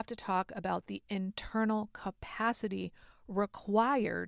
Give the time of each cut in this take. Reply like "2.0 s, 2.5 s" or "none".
none